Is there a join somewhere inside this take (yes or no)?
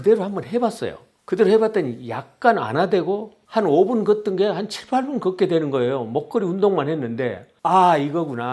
no